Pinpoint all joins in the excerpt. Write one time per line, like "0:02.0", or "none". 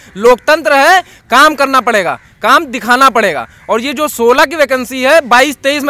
none